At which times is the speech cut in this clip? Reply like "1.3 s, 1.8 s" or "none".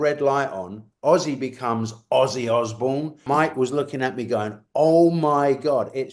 3.2 s